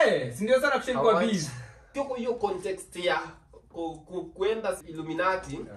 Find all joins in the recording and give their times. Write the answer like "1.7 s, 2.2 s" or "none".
1.9 s, 4.9 s

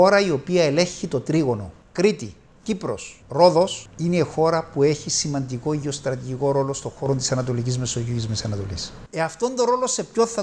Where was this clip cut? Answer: none

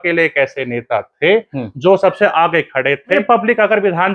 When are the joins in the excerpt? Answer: 3.2 s

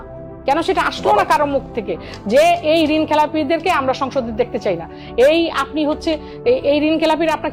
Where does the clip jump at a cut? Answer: none

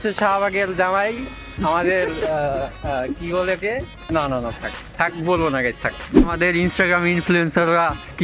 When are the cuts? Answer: 4.0 s, 6.2 s

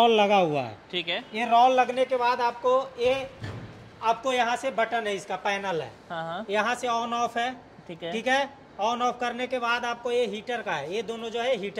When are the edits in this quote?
none

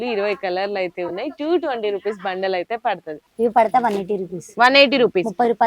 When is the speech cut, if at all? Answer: 3.2 s

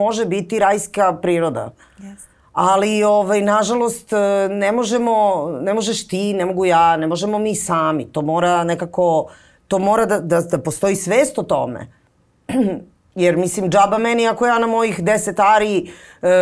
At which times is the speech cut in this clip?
none

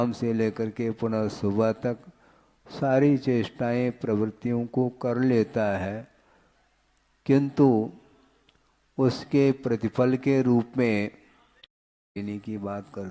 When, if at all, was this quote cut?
12.0 s

